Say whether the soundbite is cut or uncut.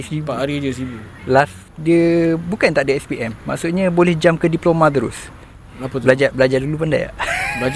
cut